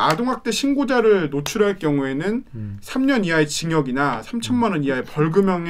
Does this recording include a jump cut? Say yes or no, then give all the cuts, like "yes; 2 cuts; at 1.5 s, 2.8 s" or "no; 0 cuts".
no; 0 cuts